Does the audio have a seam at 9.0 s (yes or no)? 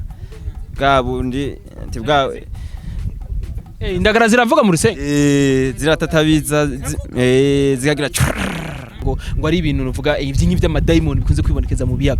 yes